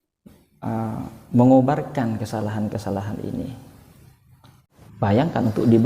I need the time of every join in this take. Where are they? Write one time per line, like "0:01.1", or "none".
0:04.6